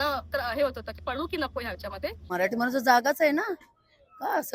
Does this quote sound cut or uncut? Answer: cut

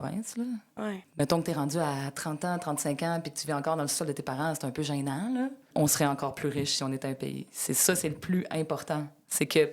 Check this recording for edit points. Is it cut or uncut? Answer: cut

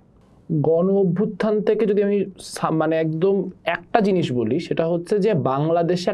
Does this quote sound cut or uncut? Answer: uncut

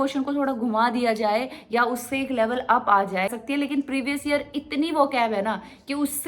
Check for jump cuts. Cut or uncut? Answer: cut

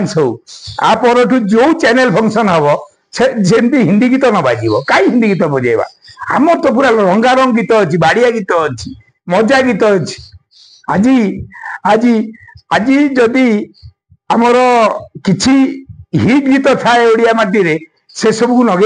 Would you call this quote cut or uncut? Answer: uncut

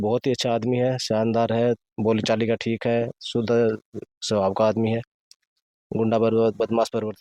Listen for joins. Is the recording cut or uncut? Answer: uncut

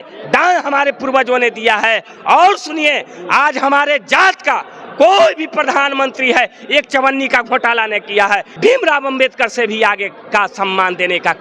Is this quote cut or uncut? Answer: cut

